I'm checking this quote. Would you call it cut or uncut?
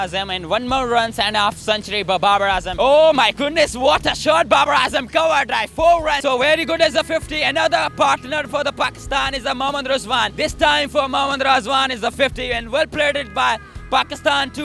cut